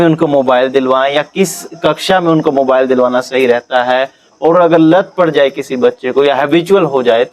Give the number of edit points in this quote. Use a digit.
0